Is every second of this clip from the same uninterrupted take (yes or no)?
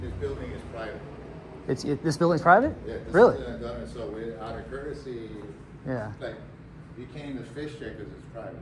yes